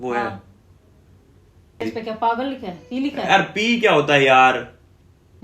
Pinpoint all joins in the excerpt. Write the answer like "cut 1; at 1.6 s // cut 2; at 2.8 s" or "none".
cut 1; at 1.8 s